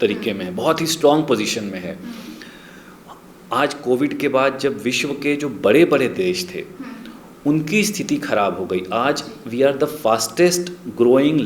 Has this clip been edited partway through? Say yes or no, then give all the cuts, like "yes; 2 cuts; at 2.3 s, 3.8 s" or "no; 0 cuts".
no; 0 cuts